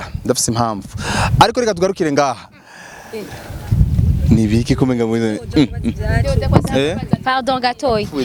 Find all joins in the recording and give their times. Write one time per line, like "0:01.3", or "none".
none